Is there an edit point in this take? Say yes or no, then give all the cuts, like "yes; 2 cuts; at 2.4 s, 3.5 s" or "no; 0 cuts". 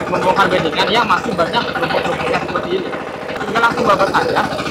yes; 1 cut; at 3.4 s